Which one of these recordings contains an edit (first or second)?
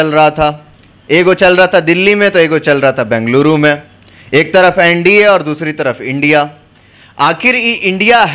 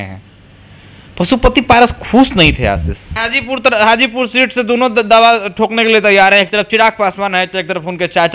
second